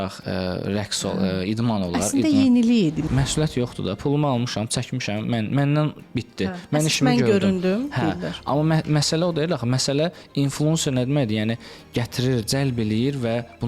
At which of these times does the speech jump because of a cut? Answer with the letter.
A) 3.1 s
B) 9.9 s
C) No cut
A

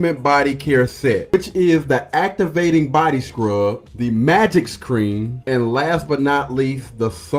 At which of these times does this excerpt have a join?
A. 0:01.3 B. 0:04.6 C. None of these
A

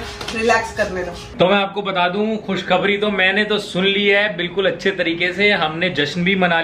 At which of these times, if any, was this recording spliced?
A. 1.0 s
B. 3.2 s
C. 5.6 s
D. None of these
A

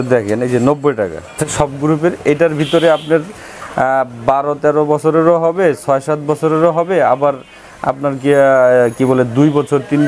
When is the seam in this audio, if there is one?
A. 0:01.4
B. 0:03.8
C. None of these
A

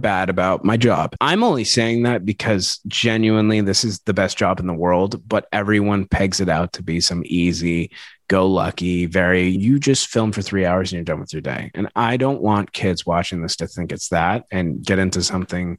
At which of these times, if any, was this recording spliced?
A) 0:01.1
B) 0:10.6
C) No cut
A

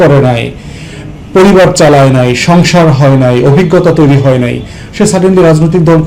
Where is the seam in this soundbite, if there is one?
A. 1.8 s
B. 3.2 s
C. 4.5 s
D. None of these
D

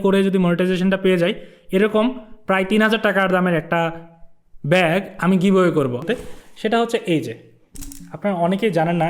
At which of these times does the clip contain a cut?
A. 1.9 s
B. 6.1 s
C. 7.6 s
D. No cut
B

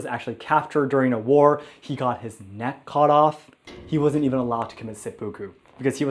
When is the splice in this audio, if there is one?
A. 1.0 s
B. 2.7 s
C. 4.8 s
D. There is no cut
D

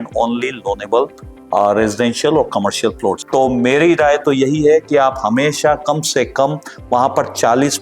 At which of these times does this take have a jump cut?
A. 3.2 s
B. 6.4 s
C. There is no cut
A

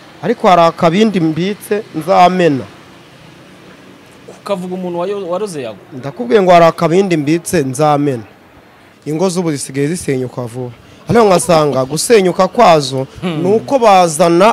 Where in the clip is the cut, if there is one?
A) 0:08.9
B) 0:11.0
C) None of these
A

